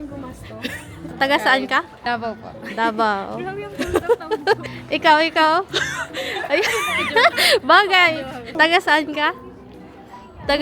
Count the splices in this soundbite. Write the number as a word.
four